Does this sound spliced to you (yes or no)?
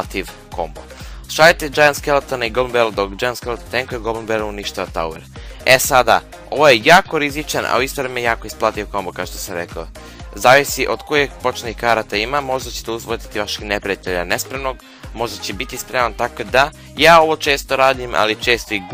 no